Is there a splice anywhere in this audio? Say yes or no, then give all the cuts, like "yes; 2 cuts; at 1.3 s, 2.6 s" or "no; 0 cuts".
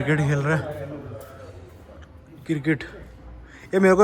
no; 0 cuts